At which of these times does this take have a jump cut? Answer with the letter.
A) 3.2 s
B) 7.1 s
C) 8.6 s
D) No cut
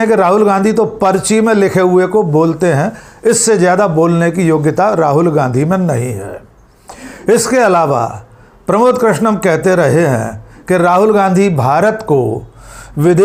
D